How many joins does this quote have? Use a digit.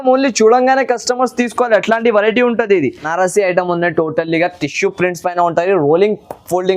1